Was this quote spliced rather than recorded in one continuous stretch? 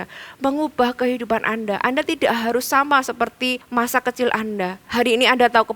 yes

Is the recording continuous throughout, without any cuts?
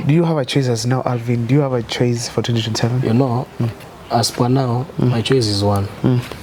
yes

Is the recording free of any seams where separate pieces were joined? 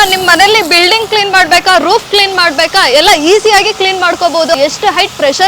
no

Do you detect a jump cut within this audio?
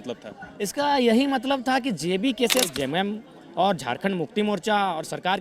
yes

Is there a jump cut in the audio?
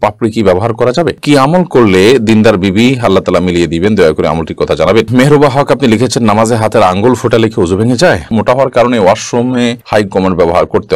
yes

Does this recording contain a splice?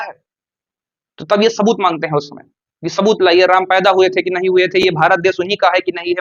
no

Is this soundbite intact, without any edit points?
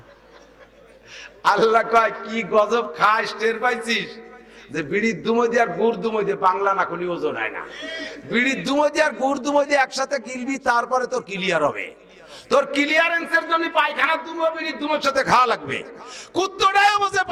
yes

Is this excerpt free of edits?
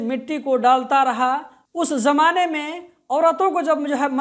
no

